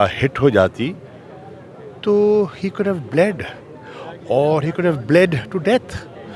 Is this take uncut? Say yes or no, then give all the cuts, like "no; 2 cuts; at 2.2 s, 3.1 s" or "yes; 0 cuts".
yes; 0 cuts